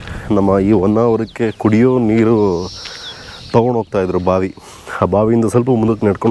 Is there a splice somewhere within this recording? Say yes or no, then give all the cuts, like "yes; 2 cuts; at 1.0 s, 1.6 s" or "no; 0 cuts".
no; 0 cuts